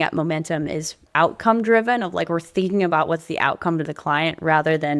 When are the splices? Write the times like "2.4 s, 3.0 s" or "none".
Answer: 1.0 s